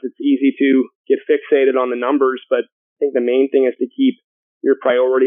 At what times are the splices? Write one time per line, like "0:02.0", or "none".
0:01.0
0:02.8